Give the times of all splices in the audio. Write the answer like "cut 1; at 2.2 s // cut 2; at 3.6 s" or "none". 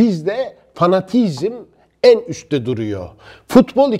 none